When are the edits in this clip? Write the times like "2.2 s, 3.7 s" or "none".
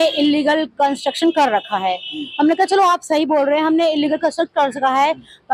none